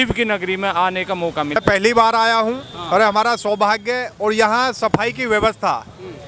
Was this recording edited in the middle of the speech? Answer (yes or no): yes